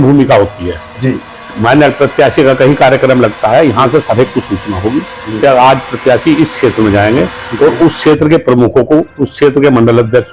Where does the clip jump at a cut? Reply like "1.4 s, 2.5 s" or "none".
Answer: none